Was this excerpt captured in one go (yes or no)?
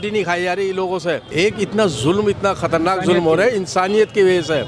no